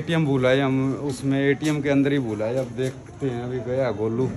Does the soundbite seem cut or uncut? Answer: uncut